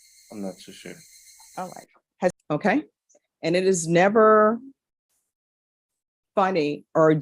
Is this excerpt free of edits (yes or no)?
no